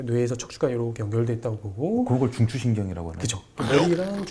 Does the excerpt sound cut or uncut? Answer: uncut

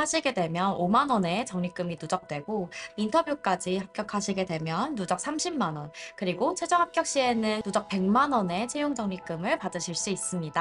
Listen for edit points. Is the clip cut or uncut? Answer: cut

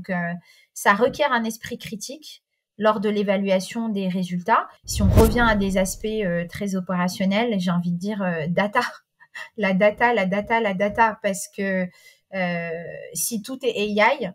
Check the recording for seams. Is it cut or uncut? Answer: cut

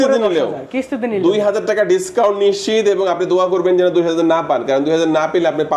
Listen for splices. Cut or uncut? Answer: uncut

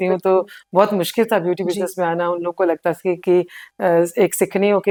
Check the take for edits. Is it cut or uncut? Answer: uncut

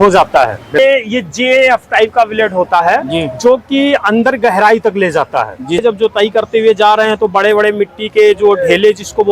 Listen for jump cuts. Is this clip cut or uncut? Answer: cut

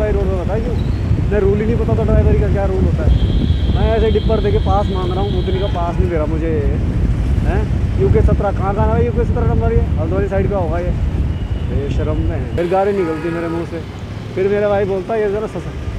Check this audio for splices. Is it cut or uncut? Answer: uncut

